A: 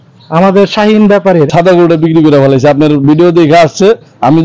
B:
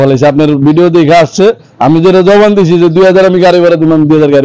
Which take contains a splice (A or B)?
A